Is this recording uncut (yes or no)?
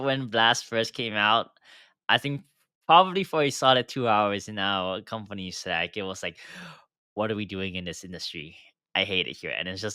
yes